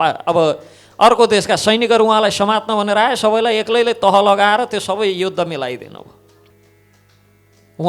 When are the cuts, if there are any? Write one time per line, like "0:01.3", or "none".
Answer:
0:06.5